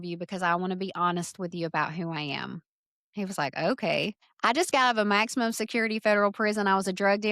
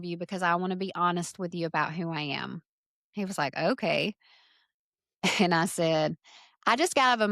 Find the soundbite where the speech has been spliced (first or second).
first